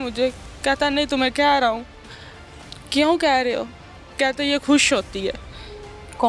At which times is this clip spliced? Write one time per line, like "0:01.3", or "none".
none